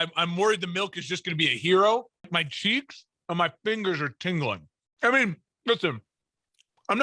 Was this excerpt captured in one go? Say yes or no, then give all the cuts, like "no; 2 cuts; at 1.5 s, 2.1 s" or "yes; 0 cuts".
no; 1 cut; at 2.3 s